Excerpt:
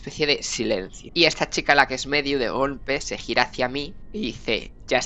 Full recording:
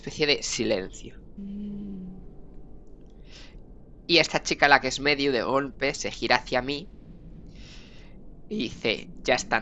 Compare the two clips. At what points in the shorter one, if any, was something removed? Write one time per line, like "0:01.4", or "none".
0:01.0
0:04.0